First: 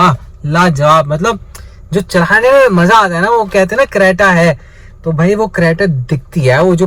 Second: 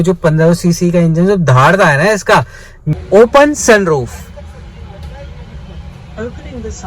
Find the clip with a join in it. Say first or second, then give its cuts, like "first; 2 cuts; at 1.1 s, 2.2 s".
second; 1 cut; at 2.9 s